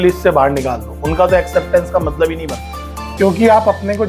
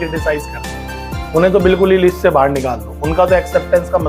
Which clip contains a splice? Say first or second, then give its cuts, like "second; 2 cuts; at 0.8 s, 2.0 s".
first; 1 cut; at 3.1 s